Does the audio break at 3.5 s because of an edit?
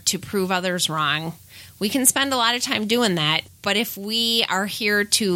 yes; 1 cut; at 3.5 s

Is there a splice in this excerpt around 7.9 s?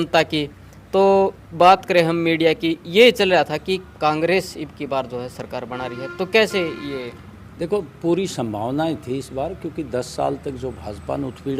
no; 0 cuts

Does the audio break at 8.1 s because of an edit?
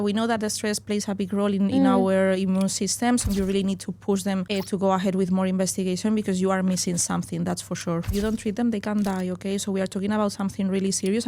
yes; 3 cuts; at 3.2 s, 4.5 s, 8.1 s

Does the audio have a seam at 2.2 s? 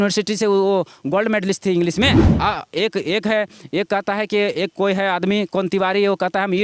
yes; 1 cut; at 2.2 s

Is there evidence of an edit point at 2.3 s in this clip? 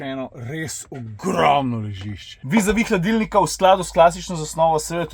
yes; 1 cut; at 2.3 s

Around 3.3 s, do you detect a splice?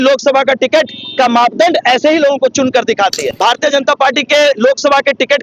yes; 1 cut; at 3.3 s

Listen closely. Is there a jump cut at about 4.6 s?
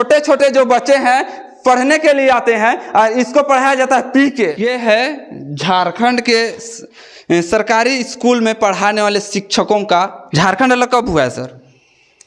yes; 2 cuts; at 4.6 s, 10.2 s

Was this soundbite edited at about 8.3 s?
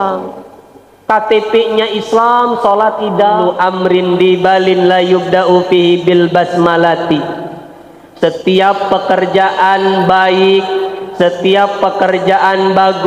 no; 1 cut; at 3.5 s

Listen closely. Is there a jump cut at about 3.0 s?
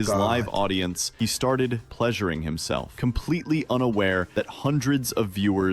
no; 0 cuts

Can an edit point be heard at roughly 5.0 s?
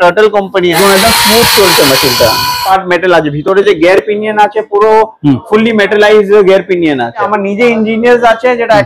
no; 3 cuts; at 0.8 s, 2.6 s, 7.3 s

